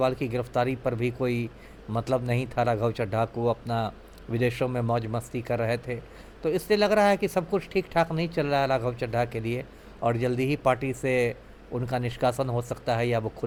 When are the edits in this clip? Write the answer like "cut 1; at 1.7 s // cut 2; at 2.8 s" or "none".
none